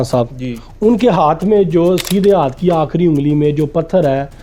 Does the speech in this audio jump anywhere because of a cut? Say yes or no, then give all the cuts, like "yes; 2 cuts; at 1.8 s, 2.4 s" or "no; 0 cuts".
no; 0 cuts